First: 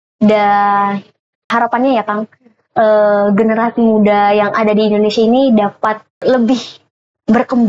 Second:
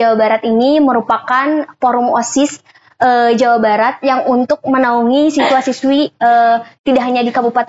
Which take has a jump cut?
first; 2 cuts; at 1.5 s, 6.2 s

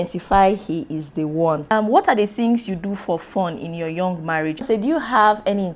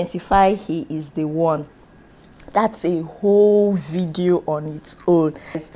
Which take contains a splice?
first; 2 cuts; at 1.7 s, 4.6 s

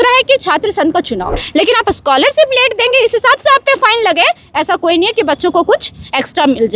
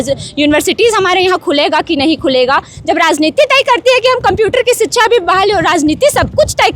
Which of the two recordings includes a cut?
first; 1 cut; at 1.4 s

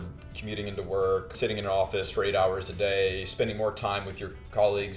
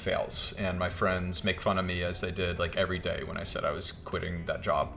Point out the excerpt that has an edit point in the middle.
first; 1 cut; at 1.3 s

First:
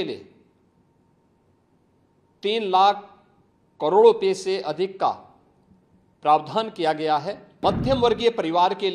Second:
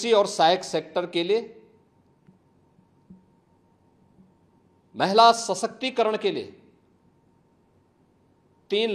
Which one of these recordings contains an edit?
first; 1 cut; at 7.4 s

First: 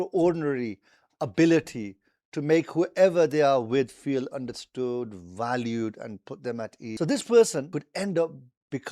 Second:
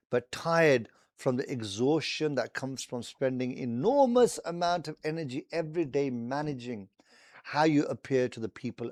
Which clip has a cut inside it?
first; 2 cuts; at 6.9 s, 7.7 s

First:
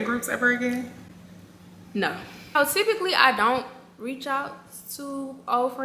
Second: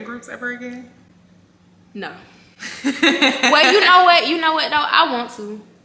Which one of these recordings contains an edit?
first; 1 cut; at 2.3 s

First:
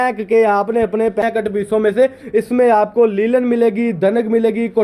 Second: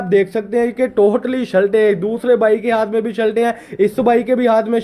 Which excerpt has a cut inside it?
first; 1 cut; at 1.2 s

